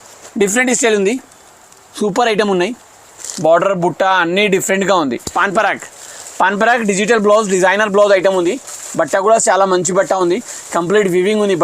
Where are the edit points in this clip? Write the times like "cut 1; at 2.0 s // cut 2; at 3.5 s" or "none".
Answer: cut 1; at 5.3 s